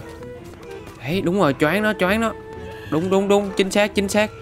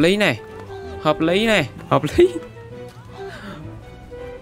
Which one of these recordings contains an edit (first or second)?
second